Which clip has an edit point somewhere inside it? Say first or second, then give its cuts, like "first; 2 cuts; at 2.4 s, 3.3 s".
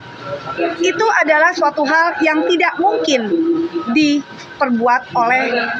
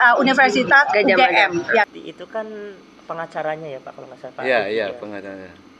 second; 1 cut; at 1.9 s